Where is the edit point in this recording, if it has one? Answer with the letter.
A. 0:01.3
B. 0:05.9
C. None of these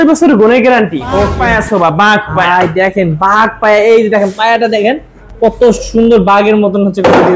A